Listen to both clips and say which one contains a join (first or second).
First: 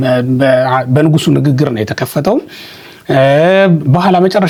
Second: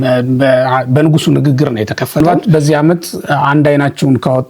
second